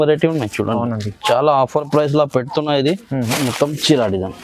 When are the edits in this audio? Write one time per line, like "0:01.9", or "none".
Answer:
0:03.2